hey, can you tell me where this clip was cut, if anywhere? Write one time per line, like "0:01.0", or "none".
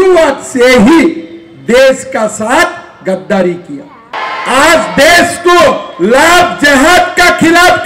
0:04.1